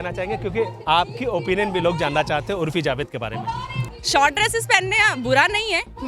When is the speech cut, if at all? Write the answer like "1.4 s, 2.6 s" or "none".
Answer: 3.9 s